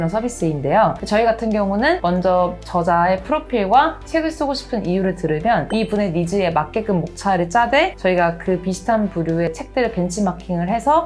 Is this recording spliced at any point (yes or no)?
yes